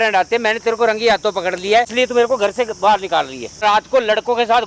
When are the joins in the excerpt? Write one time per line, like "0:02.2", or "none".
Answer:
0:01.9
0:03.6